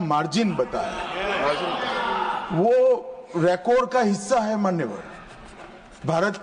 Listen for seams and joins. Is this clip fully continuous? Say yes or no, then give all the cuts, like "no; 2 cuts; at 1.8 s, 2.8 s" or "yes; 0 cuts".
yes; 0 cuts